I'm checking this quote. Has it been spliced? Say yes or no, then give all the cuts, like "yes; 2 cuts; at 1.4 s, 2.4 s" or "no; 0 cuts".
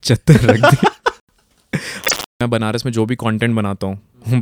yes; 1 cut; at 2.3 s